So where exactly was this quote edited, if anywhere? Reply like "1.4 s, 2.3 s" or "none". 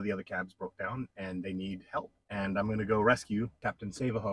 2.2 s, 3.5 s

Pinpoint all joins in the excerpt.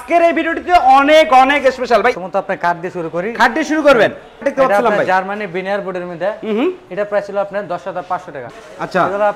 2.2 s, 4.4 s, 8.4 s

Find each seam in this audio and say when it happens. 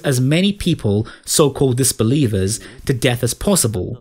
none

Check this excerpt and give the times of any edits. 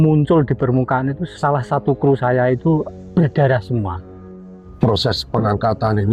1.3 s, 3.0 s, 4.1 s

